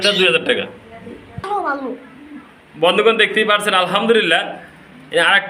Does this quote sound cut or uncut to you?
uncut